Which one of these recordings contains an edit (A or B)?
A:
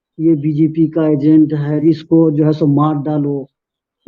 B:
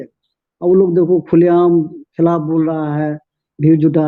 A